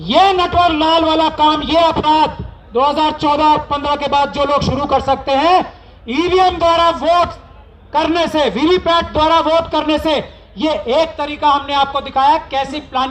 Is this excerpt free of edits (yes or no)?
yes